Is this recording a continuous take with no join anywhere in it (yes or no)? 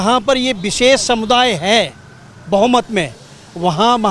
yes